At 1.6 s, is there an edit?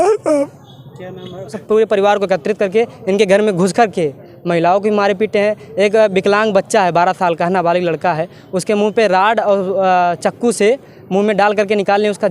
yes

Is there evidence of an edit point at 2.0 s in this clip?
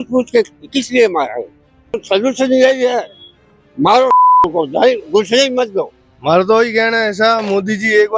yes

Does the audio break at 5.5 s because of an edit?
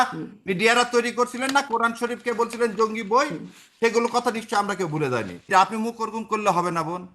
yes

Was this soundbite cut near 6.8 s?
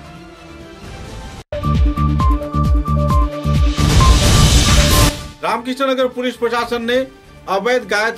no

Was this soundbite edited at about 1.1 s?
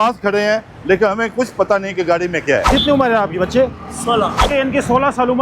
no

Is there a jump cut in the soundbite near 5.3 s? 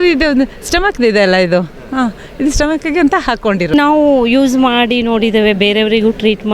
no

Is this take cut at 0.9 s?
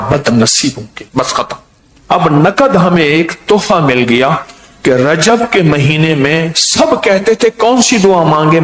yes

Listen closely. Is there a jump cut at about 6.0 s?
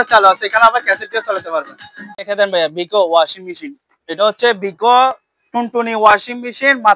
no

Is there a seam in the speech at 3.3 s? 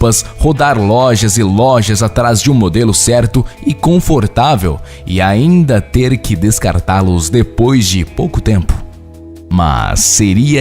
yes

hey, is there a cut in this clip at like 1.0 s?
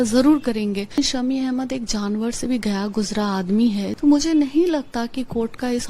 yes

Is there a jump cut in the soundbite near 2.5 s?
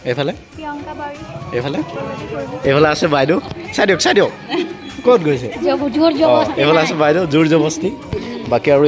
yes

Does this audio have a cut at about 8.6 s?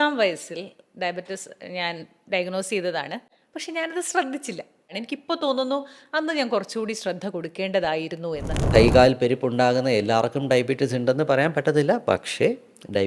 yes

